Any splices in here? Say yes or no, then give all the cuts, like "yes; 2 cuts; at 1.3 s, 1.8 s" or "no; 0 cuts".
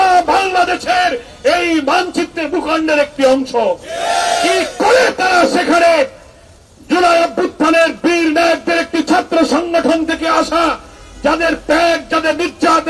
no; 0 cuts